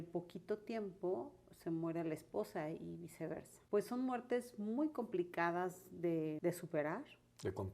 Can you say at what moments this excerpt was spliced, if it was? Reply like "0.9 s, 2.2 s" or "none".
3.5 s, 6.4 s